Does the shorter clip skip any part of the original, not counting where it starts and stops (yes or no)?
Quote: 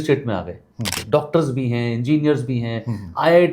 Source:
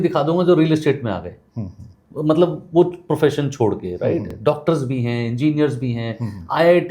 yes